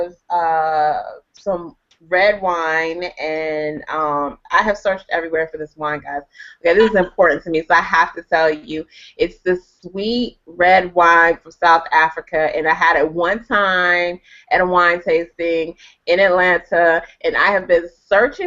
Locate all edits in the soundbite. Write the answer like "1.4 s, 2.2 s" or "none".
none